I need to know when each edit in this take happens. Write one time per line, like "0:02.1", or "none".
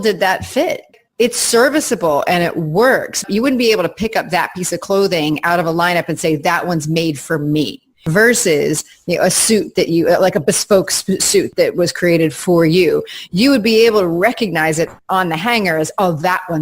0:00.9
0:03.2
0:08.1
0:11.5
0:15.0